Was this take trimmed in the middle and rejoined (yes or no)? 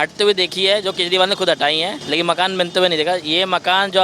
yes